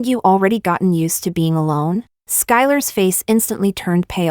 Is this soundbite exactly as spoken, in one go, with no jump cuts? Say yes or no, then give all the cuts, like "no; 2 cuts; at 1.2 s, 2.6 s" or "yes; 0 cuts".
no; 1 cut; at 2.2 s